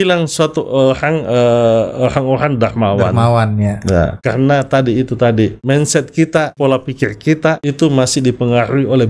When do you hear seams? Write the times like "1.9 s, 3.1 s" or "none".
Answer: 4.2 s, 5.6 s, 6.5 s, 7.6 s